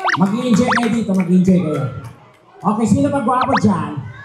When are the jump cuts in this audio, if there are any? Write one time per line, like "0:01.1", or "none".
none

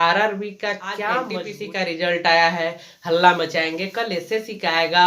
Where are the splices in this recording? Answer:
0:01.4

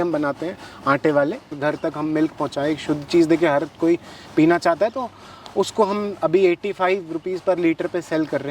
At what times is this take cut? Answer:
0:01.6

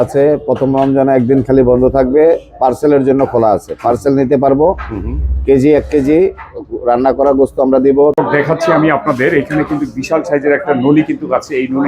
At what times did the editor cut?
0:08.2

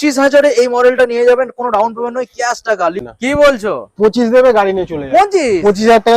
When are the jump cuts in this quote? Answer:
0:03.0

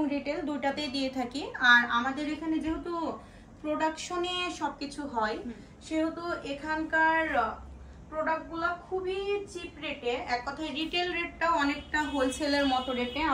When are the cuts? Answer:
none

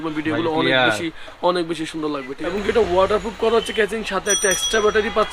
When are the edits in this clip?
0:02.3

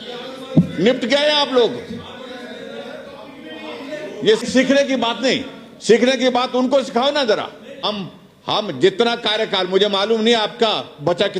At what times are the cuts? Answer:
0:04.4
0:07.8

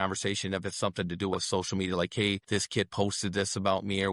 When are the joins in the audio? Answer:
0:02.4

